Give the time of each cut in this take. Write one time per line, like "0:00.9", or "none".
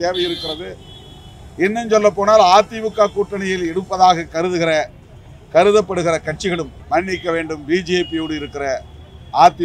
0:06.8